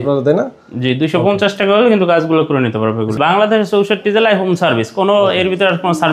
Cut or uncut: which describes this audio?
cut